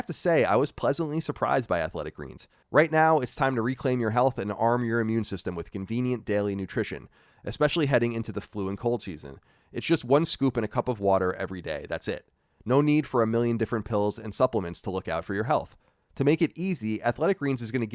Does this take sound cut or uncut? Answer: cut